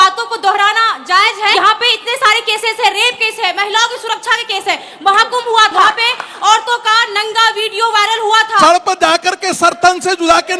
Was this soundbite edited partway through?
yes; 3 cuts; at 1.5 s, 5.8 s, 8.6 s

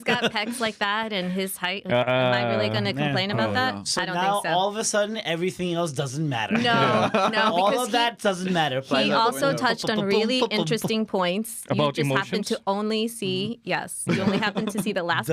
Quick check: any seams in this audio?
no; 0 cuts

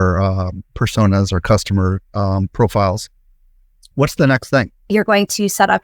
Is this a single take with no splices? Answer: no; 1 cut; at 4.9 s

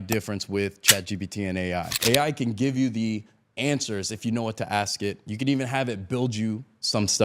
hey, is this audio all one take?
no; 1 cut; at 1.9 s

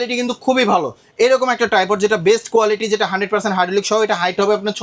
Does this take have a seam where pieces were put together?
no; 0 cuts

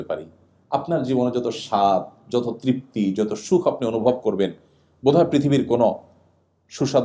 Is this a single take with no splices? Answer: yes; 0 cuts

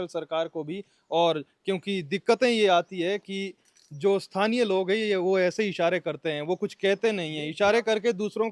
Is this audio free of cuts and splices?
yes; 0 cuts

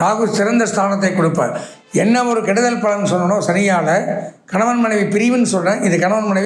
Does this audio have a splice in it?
no; 0 cuts

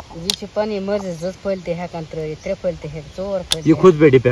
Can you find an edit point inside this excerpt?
no; 0 cuts

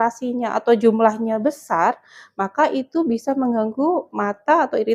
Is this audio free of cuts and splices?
yes; 0 cuts

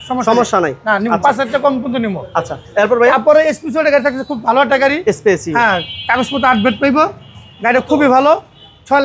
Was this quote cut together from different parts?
no; 0 cuts

